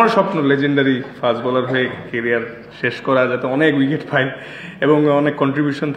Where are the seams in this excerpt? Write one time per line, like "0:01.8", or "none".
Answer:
none